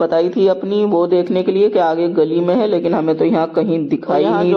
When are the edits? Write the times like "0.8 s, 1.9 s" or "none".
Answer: none